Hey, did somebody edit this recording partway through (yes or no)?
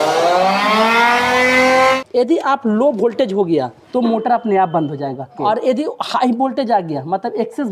yes